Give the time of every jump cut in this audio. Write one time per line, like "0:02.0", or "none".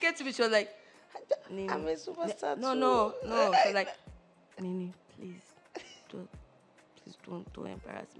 none